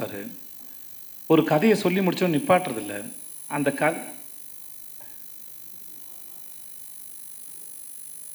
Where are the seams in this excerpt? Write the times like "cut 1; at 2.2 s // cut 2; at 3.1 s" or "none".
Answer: none